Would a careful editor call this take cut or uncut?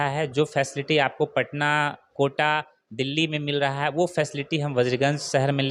uncut